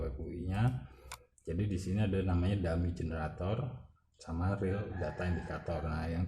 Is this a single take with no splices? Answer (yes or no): yes